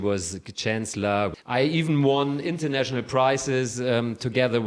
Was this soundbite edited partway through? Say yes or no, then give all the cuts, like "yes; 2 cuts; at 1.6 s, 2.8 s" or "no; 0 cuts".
yes; 1 cut; at 1.3 s